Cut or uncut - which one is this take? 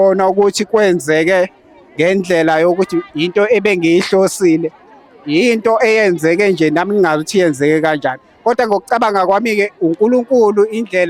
uncut